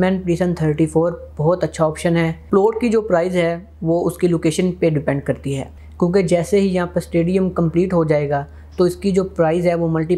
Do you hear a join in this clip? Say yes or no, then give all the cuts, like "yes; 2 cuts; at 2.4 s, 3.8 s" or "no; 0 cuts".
yes; 2 cuts; at 2.4 s, 5.7 s